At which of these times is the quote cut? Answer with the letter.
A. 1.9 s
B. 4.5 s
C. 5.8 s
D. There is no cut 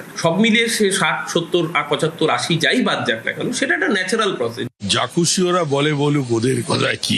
B